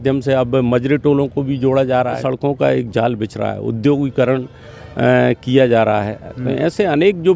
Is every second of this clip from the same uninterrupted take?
no; 1 cut; at 2.2 s

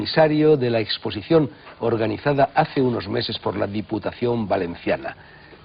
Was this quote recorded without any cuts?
yes; 0 cuts

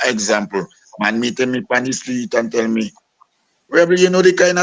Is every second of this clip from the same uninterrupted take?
yes; 0 cuts

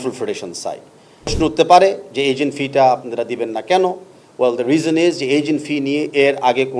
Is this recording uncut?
no; 1 cut; at 1.3 s

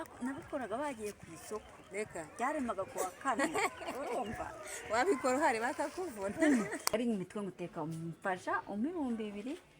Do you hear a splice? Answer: yes; 1 cut; at 6.9 s

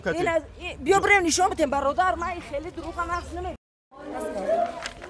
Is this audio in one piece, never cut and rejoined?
no; 1 cut; at 3.6 s

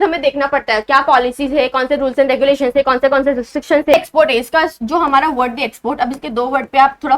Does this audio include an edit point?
yes; 1 cut; at 3.9 s

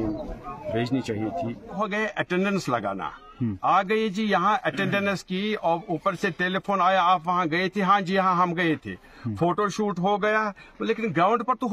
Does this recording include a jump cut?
yes; 1 cut; at 1.8 s

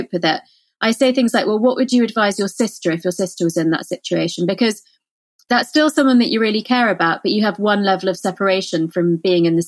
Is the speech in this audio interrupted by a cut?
no; 0 cuts

